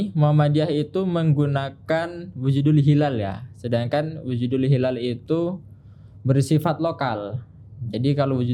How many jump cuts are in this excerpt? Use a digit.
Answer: 0